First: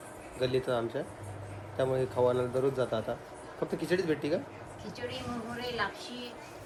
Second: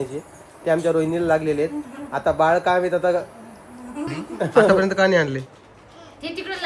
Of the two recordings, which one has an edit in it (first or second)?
second